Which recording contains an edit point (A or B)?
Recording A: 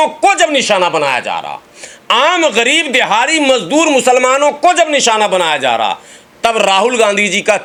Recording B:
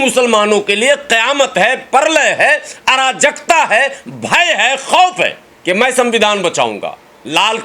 B